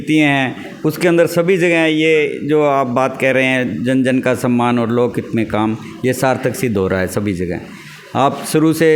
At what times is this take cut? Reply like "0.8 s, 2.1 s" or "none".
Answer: none